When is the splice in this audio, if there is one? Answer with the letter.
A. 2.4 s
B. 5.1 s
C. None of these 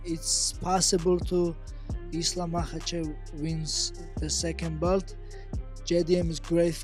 C